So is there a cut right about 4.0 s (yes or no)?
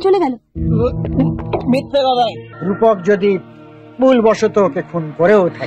no